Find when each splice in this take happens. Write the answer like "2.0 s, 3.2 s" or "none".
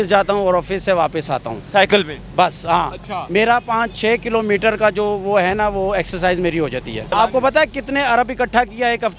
7.1 s